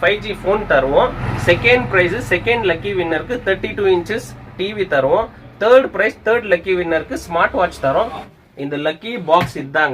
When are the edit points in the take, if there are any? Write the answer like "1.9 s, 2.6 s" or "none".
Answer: 1.3 s, 8.3 s